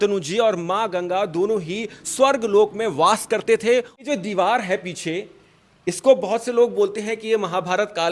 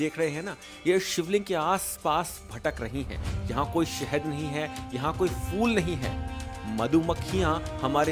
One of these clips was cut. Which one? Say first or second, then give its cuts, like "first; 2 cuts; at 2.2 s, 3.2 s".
first; 1 cut; at 3.9 s